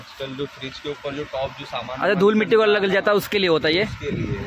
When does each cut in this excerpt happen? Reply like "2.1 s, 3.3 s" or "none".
none